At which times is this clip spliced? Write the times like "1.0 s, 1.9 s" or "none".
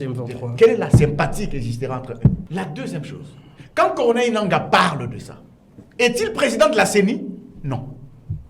2.4 s